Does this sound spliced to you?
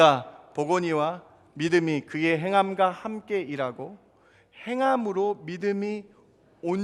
no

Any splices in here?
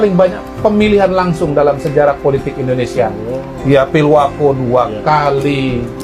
no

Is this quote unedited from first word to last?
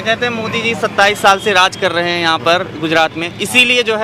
yes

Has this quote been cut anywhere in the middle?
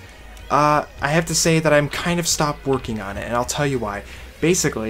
no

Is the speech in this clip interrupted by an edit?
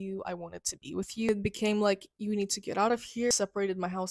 yes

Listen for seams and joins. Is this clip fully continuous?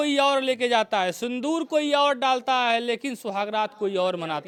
yes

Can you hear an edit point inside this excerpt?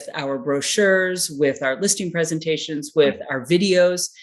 no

